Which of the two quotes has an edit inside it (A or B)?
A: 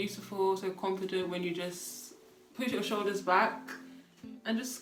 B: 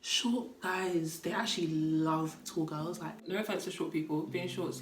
B